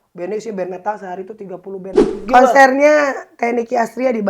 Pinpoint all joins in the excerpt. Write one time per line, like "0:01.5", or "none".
0:02.2